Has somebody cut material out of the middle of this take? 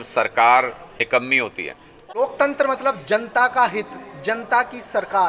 yes; 2 cuts; at 0.8 s, 2.0 s

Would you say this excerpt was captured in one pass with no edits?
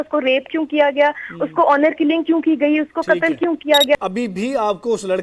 no; 1 cut; at 4.0 s

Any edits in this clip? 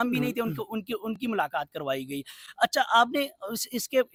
no; 0 cuts

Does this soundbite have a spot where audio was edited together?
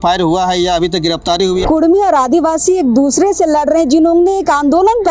yes; 1 cut; at 1.6 s

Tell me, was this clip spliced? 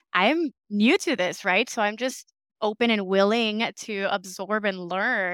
no; 0 cuts

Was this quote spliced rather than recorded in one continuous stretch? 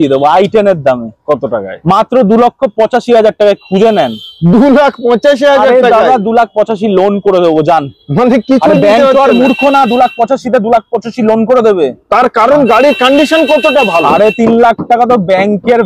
no; 0 cuts

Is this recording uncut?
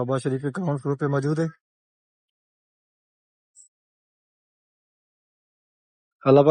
yes; 0 cuts

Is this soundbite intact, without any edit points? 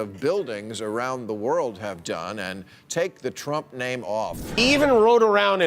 no; 1 cut; at 4.6 s

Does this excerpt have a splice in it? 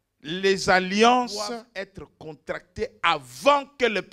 yes; 1 cut; at 1.7 s

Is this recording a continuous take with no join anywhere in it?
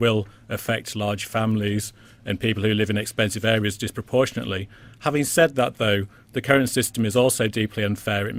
yes; 0 cuts

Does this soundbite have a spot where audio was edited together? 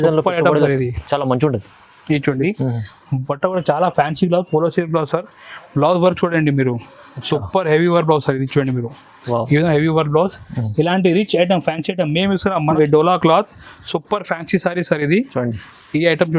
yes; 2 cuts; at 2.4 s, 12.7 s

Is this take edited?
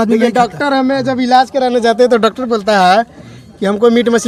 no; 0 cuts

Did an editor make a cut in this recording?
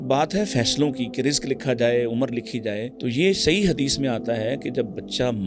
yes; 1 cut; at 3.0 s

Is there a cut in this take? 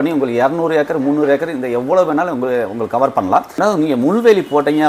yes; 1 cut; at 3.6 s

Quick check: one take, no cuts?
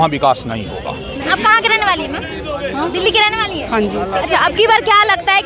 yes; 0 cuts

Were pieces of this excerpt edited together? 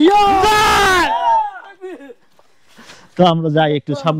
no; 0 cuts

